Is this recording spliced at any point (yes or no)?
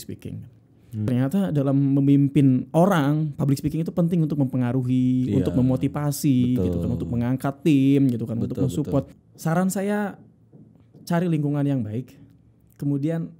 yes